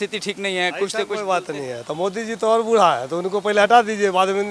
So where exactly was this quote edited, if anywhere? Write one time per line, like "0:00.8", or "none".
none